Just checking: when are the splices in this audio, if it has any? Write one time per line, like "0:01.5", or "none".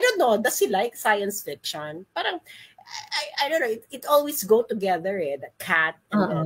none